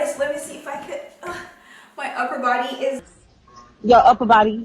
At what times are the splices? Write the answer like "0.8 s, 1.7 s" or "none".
3.0 s